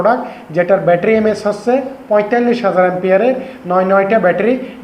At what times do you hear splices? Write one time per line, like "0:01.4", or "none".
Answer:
none